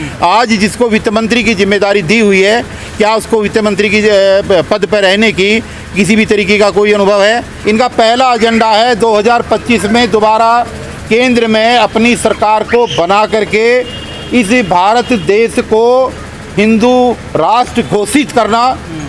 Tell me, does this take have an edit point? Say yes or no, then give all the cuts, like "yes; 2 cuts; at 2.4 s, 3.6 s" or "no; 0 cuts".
yes; 1 cut; at 7.5 s